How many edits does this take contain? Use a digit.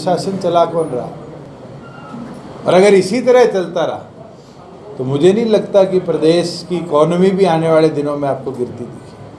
0